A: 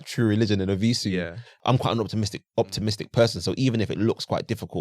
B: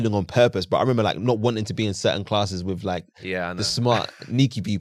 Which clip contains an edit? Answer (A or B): A